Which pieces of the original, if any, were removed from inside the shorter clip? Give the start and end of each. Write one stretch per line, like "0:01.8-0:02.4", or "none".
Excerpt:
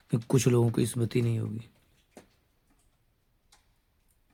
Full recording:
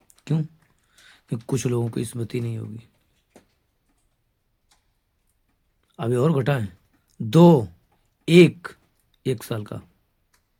none